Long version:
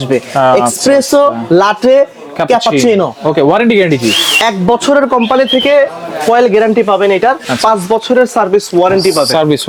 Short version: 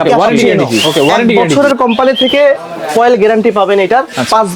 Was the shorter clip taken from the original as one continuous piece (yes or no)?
no